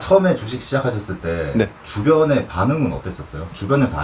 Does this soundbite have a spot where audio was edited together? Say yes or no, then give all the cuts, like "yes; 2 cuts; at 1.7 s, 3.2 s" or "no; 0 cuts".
no; 0 cuts